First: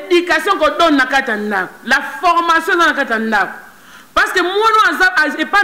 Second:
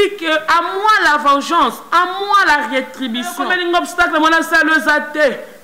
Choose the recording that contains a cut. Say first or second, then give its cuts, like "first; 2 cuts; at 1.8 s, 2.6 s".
second; 1 cut; at 3.5 s